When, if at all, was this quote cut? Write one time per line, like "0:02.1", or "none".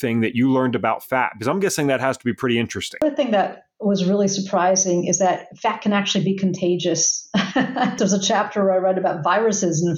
0:03.0
0:08.0